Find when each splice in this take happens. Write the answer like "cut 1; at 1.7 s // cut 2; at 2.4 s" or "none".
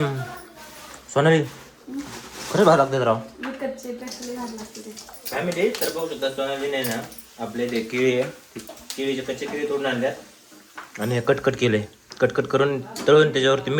none